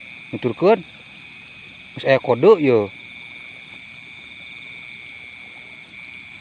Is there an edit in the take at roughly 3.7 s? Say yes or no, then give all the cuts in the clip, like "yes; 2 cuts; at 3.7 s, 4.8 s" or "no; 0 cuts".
yes; 1 cut; at 3.7 s